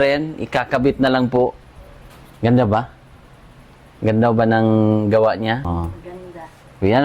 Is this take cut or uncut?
cut